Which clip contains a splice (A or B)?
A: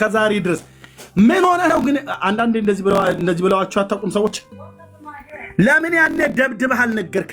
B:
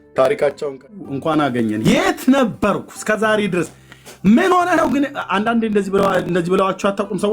B